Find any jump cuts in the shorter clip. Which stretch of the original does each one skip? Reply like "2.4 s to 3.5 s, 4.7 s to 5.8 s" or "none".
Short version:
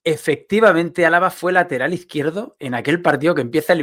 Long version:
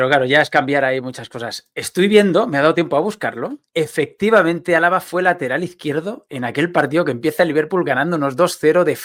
none